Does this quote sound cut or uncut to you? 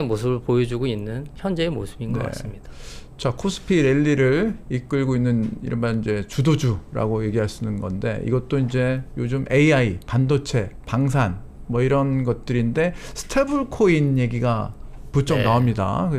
uncut